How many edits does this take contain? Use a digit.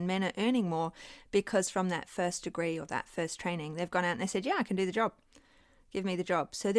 0